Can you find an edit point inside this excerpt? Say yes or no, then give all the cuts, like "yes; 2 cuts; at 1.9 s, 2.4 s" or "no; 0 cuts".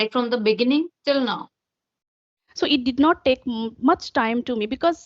yes; 1 cut; at 2.4 s